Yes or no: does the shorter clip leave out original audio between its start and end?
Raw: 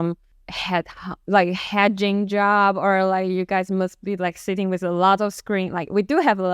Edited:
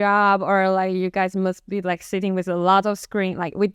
no